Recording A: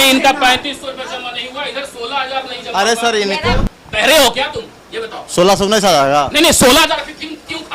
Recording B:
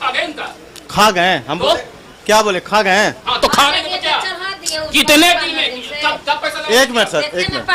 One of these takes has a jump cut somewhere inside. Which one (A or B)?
A